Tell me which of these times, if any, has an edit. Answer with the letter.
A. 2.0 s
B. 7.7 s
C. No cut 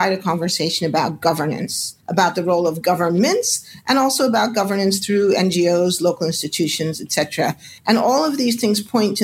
C